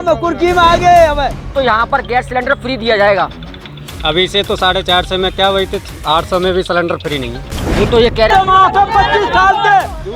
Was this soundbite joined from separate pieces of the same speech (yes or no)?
yes